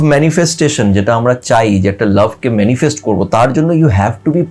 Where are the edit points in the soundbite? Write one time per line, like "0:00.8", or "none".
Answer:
none